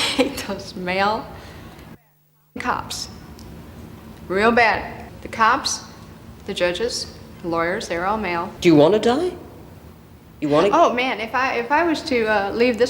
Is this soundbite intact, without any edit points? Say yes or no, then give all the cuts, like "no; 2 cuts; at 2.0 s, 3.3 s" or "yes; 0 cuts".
yes; 0 cuts